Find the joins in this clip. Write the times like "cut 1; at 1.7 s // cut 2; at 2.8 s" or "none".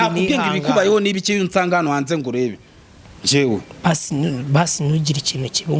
none